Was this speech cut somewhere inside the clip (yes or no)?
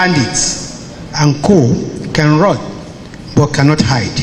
no